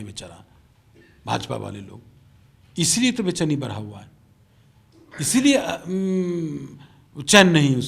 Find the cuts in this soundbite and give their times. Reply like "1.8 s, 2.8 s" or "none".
none